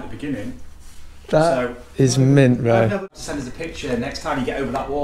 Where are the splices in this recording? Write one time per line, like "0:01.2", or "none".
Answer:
0:03.1